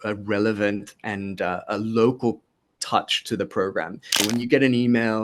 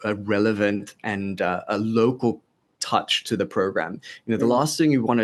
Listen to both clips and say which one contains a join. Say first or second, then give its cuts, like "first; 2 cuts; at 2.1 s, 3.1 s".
first; 1 cut; at 4.2 s